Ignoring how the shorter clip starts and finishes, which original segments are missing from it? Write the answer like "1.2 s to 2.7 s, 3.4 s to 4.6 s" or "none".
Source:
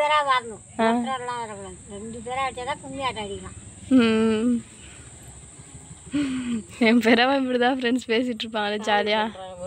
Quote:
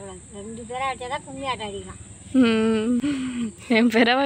4.6 s to 6.1 s